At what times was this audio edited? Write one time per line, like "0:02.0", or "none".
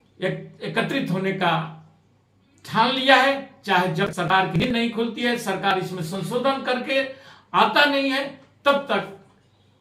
none